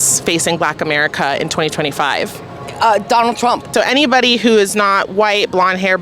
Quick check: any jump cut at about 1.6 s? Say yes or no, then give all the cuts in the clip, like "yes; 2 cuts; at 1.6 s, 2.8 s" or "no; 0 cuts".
no; 1 cut; at 3.7 s